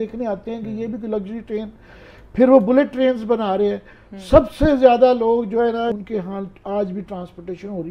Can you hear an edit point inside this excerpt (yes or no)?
yes